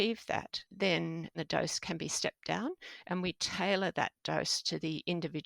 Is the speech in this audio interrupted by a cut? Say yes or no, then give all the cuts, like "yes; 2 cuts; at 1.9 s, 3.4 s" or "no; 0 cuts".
yes; 1 cut; at 1.3 s